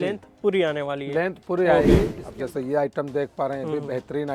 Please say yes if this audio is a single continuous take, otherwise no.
no